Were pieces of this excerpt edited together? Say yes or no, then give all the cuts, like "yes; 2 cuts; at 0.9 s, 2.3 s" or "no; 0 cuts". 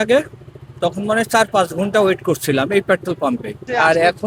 no; 0 cuts